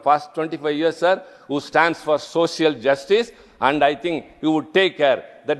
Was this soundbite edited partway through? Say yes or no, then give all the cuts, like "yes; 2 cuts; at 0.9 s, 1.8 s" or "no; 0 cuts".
no; 0 cuts